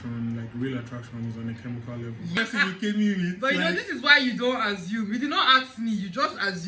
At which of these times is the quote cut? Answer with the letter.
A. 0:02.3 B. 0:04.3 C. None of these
A